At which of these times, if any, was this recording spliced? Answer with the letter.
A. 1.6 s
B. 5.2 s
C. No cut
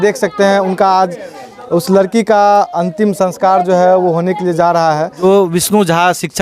B